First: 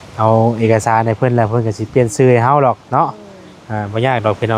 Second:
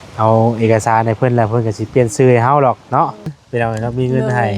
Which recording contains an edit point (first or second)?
second